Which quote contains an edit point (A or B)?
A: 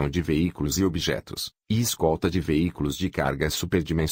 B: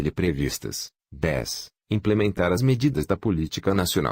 B